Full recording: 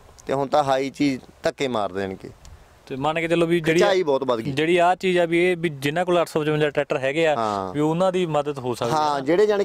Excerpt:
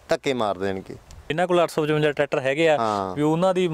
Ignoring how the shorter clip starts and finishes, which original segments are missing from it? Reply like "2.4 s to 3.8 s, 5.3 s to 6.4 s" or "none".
2.6 s to 5.8 s